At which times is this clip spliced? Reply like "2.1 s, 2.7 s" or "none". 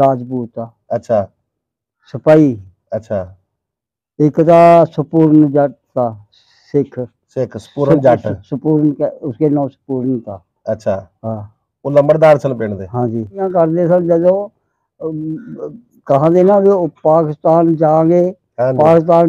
13.5 s